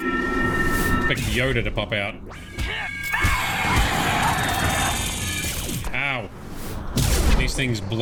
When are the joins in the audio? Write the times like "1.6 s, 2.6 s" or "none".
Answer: none

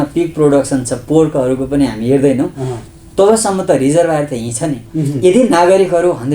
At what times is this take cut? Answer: 4.8 s

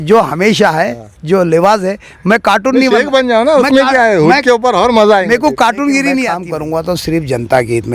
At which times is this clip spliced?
6.5 s

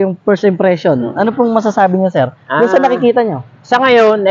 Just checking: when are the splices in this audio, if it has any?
none

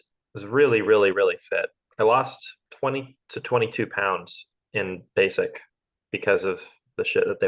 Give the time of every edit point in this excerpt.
2.8 s

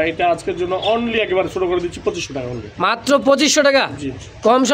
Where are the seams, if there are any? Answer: none

